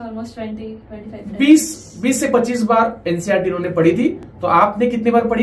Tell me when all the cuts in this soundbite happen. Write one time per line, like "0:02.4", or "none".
none